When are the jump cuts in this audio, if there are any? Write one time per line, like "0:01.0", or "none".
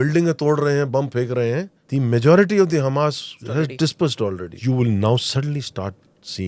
0:01.8
0:03.3
0:04.5

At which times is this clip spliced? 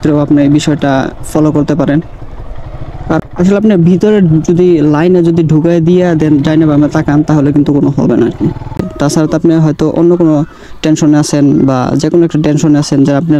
0:03.2
0:08.9

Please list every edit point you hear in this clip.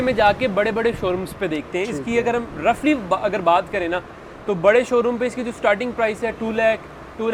none

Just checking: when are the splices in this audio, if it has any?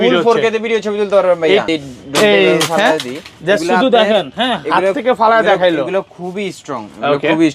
0:01.7

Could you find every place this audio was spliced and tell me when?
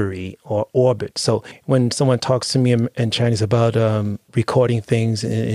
0:01.5

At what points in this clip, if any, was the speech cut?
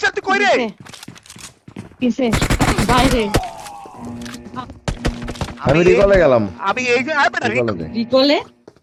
none

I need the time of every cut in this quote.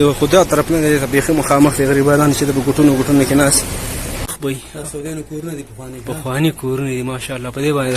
0:04.4

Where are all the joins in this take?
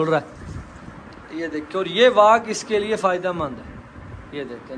none

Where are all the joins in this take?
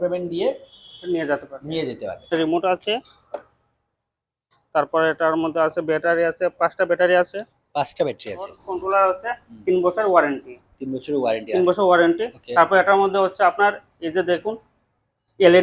0:02.3
0:08.6

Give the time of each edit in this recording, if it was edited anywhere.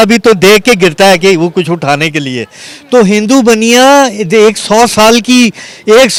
none

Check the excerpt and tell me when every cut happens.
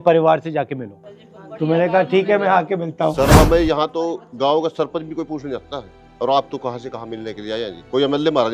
0:03.3

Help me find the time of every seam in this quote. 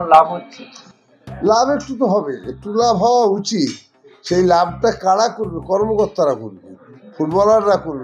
none

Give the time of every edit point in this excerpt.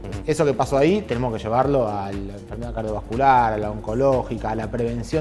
none

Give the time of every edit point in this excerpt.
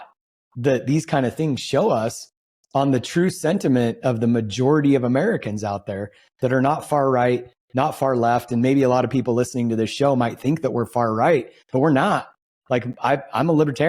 none

